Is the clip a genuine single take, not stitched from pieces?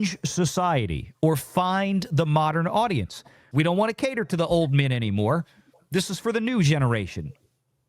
no; 1 cut; at 3.3 s

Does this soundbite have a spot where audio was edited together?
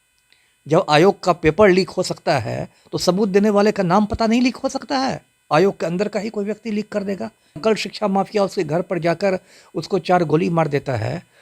yes; 1 cut; at 7.6 s

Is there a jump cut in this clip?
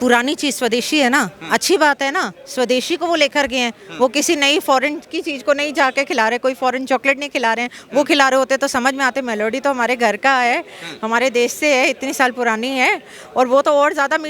no; 0 cuts

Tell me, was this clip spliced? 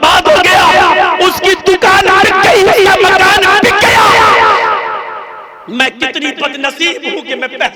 no; 0 cuts

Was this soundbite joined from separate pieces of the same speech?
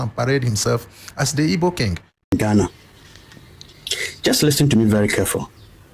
yes; 1 cut; at 2.3 s

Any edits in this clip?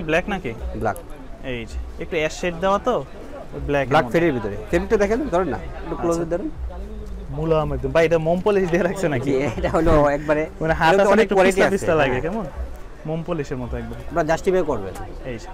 no; 0 cuts

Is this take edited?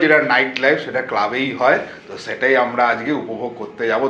no; 0 cuts

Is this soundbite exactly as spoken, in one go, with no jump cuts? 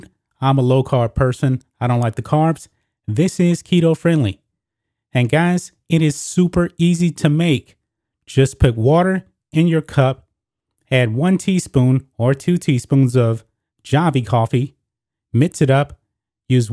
yes; 0 cuts

